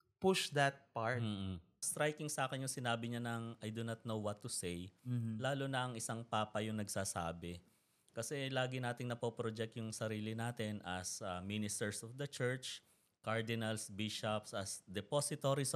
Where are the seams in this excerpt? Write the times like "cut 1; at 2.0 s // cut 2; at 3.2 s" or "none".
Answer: cut 1; at 1.8 s